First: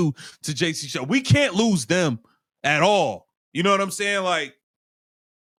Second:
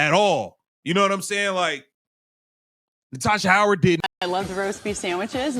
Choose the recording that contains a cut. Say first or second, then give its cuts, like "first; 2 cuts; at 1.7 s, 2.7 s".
second; 1 cut; at 4.2 s